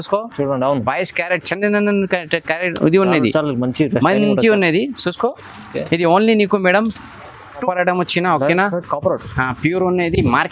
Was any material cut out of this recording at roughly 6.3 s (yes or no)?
no